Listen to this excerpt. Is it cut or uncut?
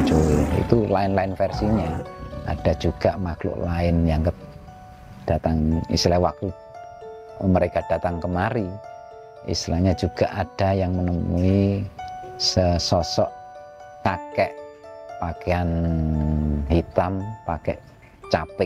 uncut